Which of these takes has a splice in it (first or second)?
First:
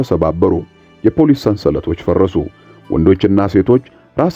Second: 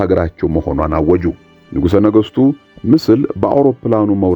second